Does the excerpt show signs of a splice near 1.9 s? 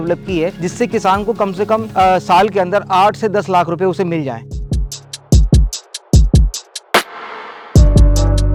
no; 0 cuts

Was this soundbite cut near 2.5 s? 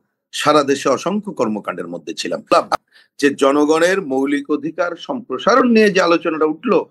yes; 1 cut; at 2.5 s

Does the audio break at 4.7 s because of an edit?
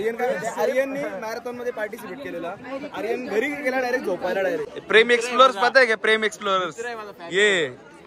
yes; 1 cut; at 4.7 s

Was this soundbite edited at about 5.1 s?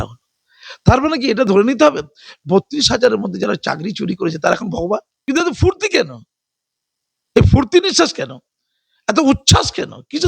yes; 1 cut; at 5.1 s

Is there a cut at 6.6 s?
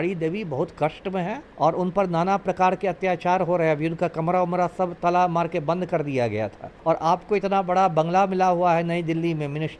yes; 2 cuts; at 1.4 s, 6.6 s

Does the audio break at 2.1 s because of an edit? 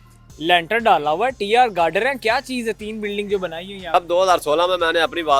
no; 1 cut; at 3.9 s

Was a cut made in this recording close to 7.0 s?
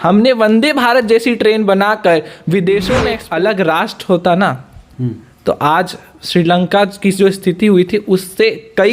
no; 1 cut; at 3.2 s

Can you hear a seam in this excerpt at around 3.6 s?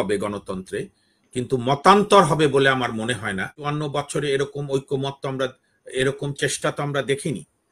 yes; 1 cut; at 3.6 s

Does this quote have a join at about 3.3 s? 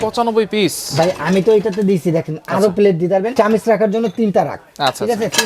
yes; 1 cut; at 3.3 s

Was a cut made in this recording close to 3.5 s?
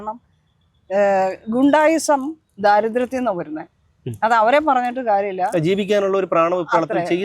no; 0 cuts

